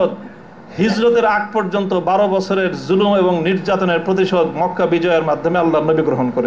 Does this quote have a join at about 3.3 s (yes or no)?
no